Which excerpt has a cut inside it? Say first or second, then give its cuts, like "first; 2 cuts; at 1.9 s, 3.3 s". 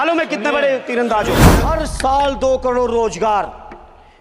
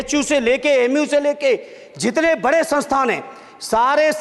first; 1 cut; at 1.5 s